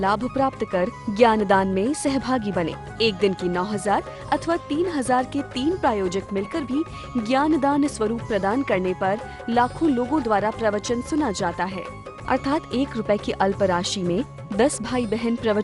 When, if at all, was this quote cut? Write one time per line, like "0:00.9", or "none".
none